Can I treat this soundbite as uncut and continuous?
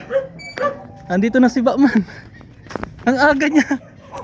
yes; 0 cuts

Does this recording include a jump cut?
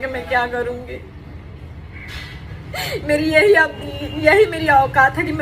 no; 0 cuts

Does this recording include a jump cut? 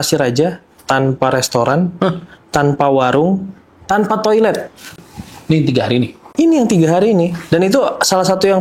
no; 0 cuts

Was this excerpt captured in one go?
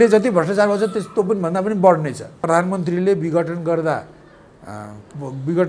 no; 1 cut; at 2.3 s

